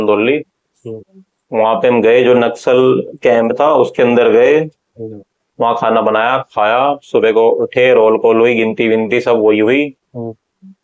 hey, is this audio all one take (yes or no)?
yes